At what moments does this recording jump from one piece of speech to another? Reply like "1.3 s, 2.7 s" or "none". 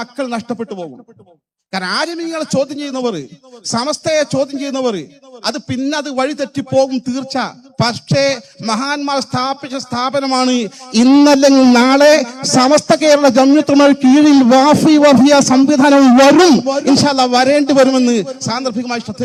none